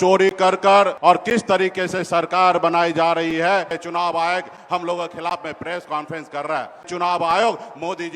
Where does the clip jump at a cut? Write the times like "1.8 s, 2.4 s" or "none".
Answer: 0.9 s, 3.8 s, 6.9 s